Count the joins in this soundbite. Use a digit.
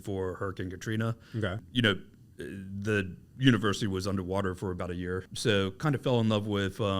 2